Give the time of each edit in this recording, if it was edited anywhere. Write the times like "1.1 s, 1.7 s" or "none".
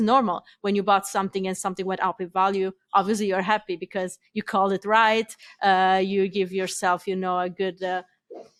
none